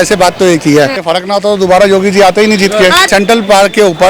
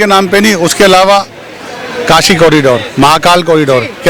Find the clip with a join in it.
first; 2 cuts; at 1.0 s, 3.1 s

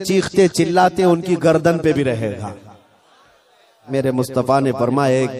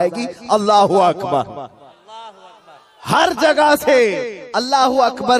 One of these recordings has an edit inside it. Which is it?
first; 1 cut; at 3.9 s

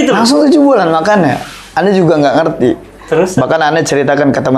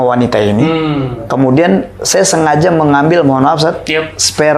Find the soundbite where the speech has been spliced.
second; 1 cut; at 1.2 s

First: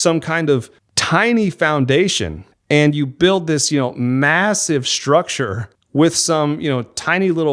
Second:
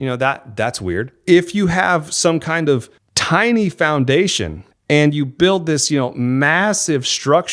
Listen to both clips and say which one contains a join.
second; 1 cut; at 1.1 s

